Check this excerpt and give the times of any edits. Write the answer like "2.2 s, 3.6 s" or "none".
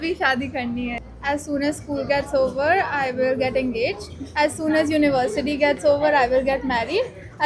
0.9 s